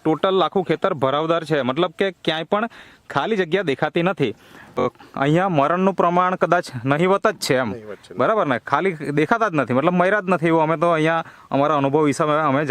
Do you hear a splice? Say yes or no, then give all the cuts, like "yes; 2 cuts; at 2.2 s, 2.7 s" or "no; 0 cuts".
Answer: yes; 1 cut; at 4.8 s